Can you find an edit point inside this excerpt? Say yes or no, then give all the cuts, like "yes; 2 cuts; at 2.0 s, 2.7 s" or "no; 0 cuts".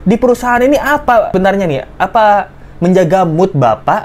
yes; 1 cut; at 1.3 s